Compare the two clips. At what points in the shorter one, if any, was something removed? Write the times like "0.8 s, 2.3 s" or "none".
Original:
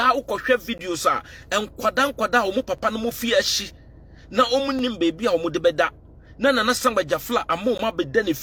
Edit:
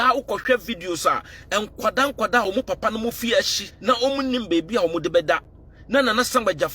3.6 s